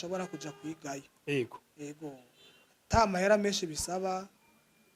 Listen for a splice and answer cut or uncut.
uncut